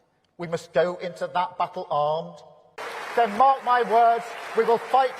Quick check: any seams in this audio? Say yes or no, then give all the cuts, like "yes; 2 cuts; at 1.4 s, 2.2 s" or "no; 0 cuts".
yes; 1 cut; at 2.9 s